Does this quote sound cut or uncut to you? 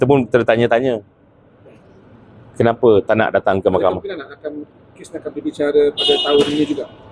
uncut